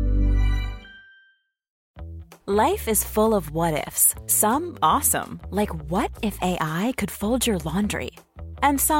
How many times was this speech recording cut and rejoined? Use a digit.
1